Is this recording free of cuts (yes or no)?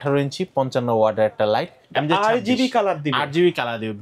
no